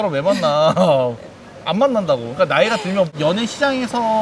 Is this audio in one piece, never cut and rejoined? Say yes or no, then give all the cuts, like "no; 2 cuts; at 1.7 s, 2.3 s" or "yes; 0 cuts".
no; 1 cut; at 3.2 s